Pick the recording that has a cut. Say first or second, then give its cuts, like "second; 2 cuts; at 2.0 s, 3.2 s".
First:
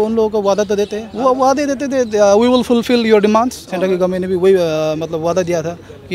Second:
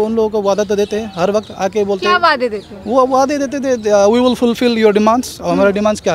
first; 2 cuts; at 1.0 s, 3.6 s